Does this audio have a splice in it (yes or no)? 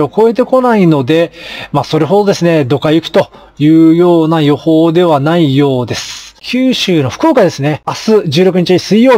yes